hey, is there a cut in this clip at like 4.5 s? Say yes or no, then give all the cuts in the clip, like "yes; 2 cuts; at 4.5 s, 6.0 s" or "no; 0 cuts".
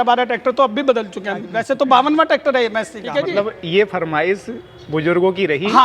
no; 2 cuts; at 1.4 s, 3.0 s